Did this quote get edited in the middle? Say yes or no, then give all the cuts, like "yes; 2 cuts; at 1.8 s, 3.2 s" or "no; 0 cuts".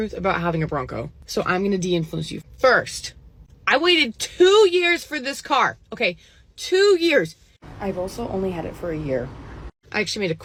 no; 0 cuts